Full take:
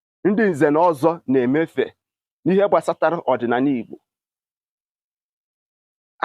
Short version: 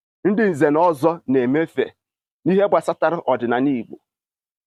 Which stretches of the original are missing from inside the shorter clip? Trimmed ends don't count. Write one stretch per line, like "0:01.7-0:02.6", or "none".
none